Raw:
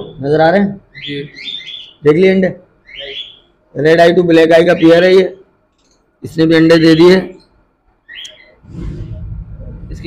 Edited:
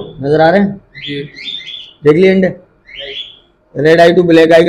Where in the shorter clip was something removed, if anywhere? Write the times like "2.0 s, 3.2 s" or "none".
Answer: none